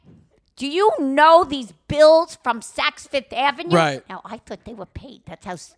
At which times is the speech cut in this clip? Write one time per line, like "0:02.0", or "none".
none